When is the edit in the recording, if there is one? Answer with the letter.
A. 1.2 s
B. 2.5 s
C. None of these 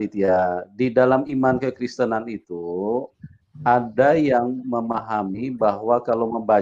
C